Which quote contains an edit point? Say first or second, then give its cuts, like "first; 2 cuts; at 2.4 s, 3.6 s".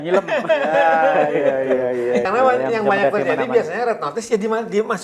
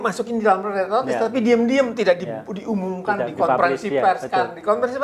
first; 1 cut; at 2.2 s